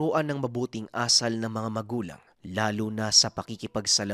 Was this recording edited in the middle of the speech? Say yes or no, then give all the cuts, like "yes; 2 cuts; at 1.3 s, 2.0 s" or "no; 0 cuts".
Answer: no; 0 cuts